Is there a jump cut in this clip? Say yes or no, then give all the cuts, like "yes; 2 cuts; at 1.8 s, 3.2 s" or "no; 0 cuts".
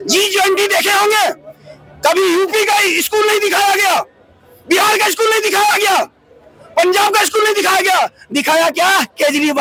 no; 0 cuts